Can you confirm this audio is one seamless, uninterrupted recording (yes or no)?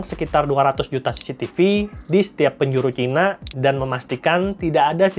yes